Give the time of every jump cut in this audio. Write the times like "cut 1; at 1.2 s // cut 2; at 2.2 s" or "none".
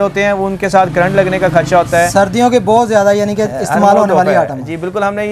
none